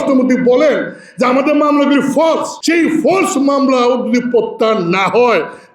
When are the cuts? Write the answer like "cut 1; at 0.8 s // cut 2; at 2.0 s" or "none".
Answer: cut 1; at 2.5 s

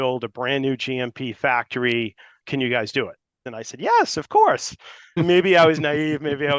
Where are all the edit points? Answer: cut 1; at 2.4 s // cut 2; at 3.4 s // cut 3; at 5.1 s

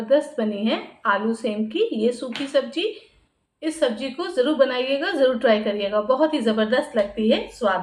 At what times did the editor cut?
none

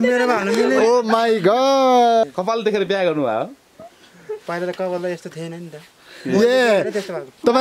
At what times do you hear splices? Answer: cut 1; at 2.2 s

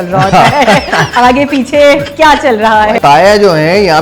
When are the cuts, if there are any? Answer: cut 1; at 3.0 s

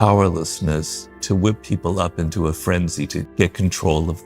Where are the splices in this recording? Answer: cut 1; at 1.2 s // cut 2; at 3.3 s

